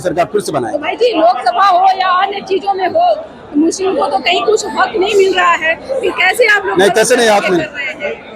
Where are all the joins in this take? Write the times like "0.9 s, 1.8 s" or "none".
none